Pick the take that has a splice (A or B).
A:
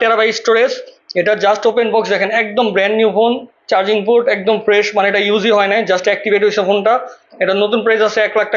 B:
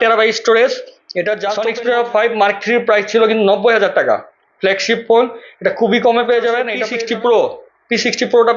B